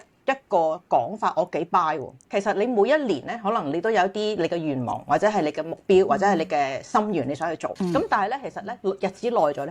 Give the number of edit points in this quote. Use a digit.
2